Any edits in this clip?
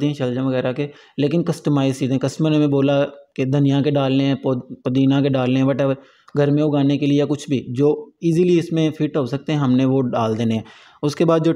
no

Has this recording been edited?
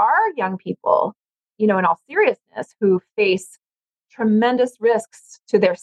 no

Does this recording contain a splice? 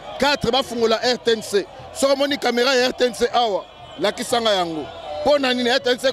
no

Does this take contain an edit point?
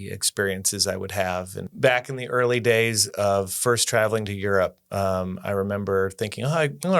yes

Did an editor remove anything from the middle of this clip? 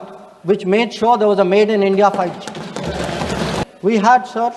yes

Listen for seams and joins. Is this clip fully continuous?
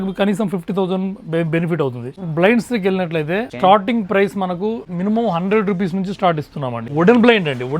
no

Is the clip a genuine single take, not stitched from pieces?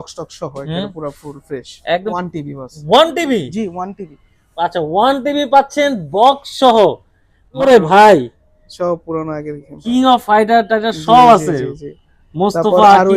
no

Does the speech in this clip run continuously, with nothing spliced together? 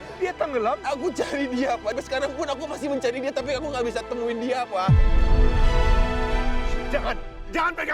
yes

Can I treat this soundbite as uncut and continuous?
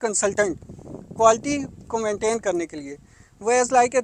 yes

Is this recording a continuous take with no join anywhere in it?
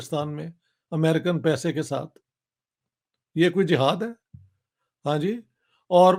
yes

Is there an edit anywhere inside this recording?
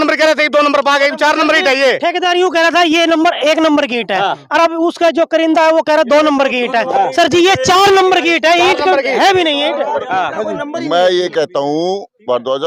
no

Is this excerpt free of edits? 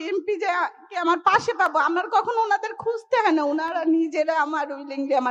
yes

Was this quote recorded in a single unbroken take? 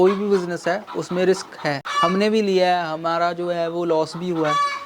no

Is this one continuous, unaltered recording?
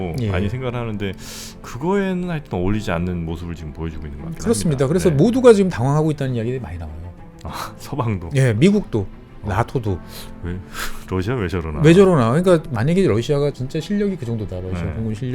no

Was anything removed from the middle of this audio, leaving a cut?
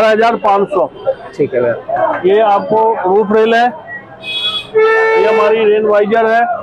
no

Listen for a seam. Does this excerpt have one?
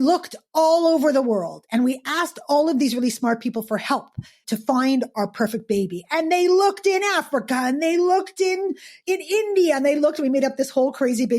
yes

